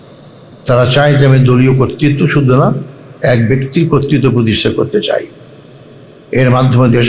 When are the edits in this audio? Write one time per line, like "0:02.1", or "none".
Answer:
none